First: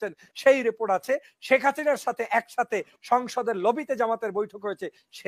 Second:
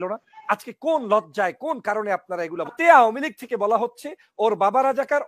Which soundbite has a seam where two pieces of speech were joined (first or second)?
second